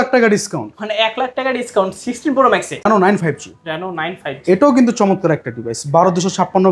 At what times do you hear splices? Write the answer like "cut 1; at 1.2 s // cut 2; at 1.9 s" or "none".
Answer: cut 1; at 2.9 s